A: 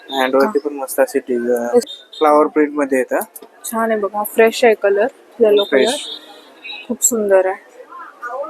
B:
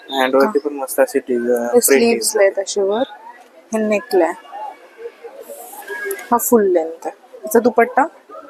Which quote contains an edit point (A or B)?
A